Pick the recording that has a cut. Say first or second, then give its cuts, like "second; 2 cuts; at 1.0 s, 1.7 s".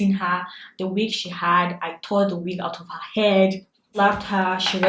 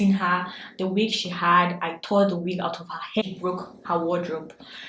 second; 1 cut; at 3.2 s